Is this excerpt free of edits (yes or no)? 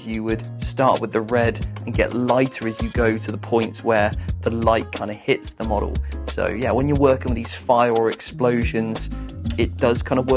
yes